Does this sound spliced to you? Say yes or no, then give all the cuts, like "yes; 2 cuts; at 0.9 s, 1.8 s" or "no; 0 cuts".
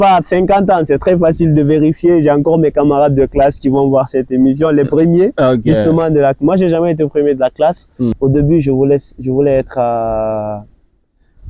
yes; 1 cut; at 8.1 s